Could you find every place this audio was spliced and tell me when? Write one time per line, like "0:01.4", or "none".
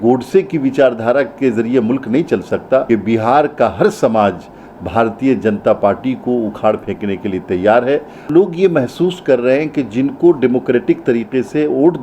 0:02.8
0:08.3